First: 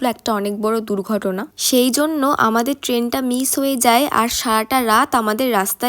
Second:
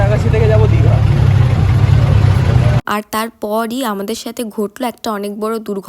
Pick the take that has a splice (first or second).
second